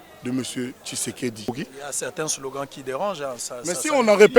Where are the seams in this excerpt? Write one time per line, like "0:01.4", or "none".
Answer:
0:01.5